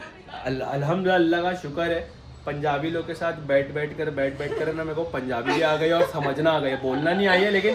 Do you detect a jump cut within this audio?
no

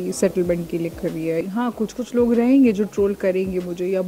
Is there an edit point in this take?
yes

